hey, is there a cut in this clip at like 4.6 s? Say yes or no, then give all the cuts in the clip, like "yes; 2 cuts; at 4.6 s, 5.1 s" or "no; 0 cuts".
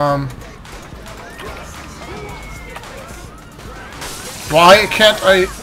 no; 0 cuts